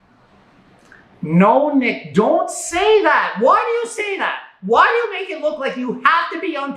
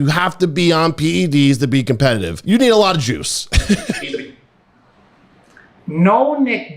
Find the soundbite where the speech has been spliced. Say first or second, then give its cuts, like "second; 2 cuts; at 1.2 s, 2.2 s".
second; 1 cut; at 2.4 s